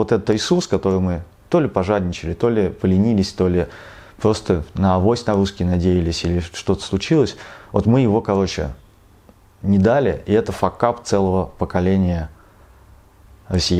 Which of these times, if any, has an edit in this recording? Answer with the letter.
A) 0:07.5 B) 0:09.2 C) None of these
C